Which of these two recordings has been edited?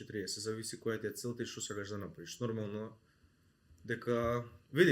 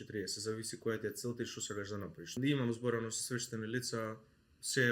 second; 1 cut; at 2.4 s

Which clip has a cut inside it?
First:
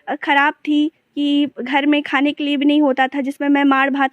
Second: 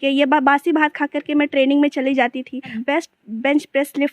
second; 1 cut; at 2.8 s

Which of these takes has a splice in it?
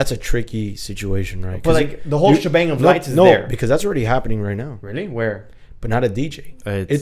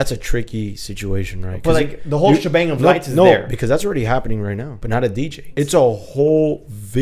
second; 1 cut; at 5.0 s

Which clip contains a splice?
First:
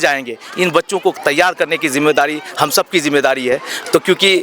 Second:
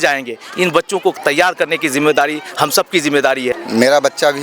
second; 1 cut; at 3.5 s

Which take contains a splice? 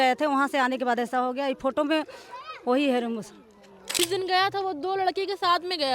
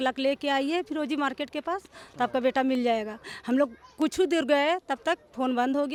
first; 1 cut; at 4.0 s

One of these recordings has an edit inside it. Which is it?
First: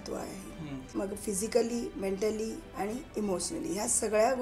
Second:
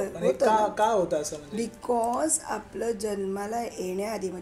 first; 2 cuts; at 0.9 s, 2.6 s

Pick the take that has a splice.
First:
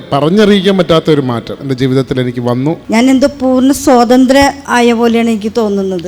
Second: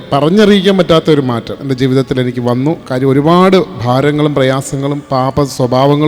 first; 1 cut; at 2.8 s

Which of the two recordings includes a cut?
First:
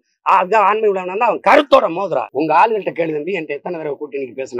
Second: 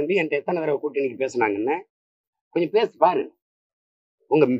first; 1 cut; at 2.3 s

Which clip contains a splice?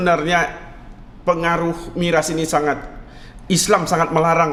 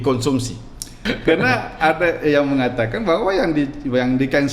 second; 1 cut; at 1.0 s

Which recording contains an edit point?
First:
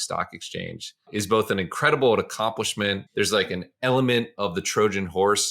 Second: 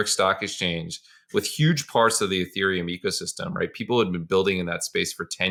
first; 2 cuts; at 1.1 s, 3.0 s

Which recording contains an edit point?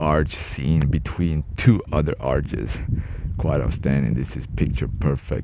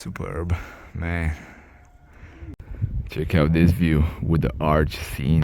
second; 1 cut; at 2.6 s

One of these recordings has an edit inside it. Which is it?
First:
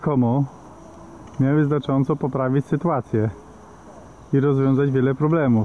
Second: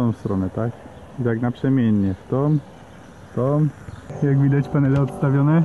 second; 1 cut; at 4.2 s

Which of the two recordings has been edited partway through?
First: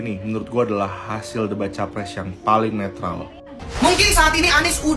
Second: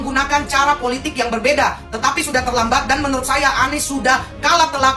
first; 1 cut; at 3.6 s

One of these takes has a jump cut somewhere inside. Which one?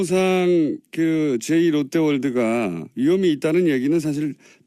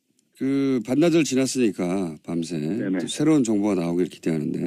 first; 1 cut; at 1.5 s

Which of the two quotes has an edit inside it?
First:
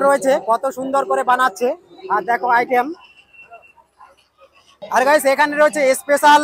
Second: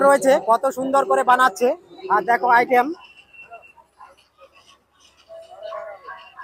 first; 1 cut; at 4.7 s

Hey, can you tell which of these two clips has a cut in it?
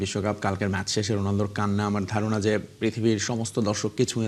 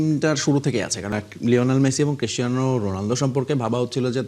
second; 1 cut; at 1.1 s

